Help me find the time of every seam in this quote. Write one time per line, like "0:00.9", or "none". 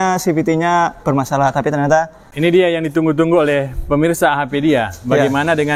0:02.2